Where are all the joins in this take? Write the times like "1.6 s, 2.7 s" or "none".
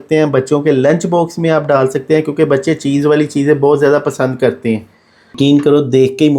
5.3 s